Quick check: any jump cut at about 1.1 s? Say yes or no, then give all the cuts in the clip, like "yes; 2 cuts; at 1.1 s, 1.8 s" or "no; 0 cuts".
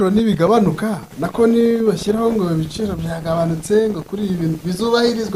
no; 0 cuts